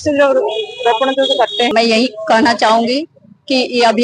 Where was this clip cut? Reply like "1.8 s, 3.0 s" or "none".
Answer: 1.7 s